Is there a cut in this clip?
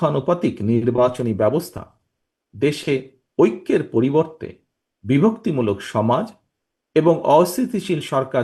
no; 0 cuts

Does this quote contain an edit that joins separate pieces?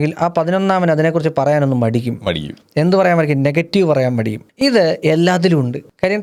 no; 0 cuts

